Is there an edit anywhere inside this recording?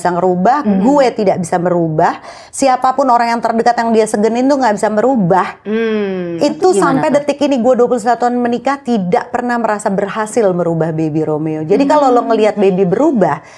no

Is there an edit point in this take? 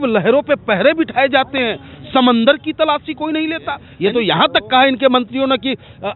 yes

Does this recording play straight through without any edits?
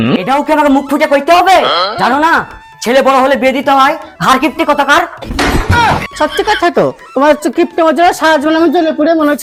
yes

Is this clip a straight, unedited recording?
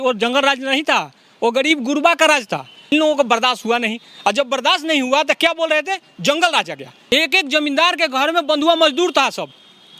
no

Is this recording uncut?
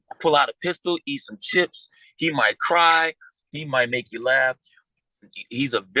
yes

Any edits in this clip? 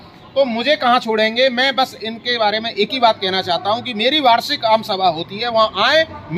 no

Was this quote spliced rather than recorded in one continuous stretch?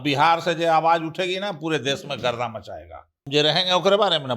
yes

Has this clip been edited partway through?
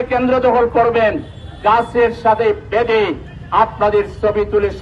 no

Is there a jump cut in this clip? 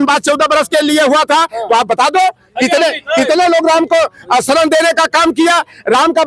no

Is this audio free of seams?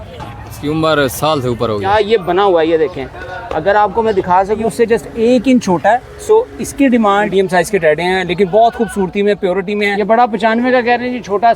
no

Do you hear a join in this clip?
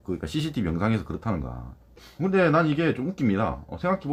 no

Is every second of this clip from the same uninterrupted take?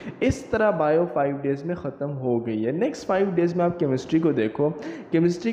yes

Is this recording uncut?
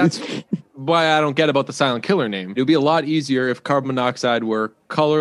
no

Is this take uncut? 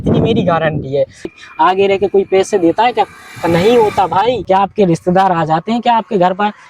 no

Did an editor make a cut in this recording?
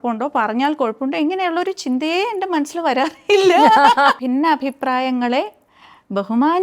yes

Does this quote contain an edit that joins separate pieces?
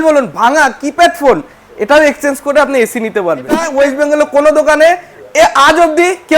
yes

